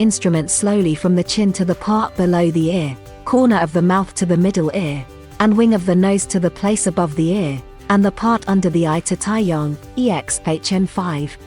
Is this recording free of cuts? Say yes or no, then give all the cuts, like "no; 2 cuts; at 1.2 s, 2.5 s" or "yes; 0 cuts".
yes; 0 cuts